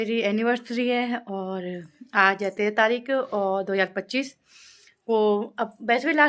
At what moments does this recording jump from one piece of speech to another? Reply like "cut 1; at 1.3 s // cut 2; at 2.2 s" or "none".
none